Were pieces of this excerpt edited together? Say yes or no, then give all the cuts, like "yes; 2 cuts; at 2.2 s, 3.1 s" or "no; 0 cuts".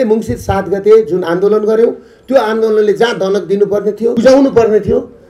yes; 1 cut; at 4.1 s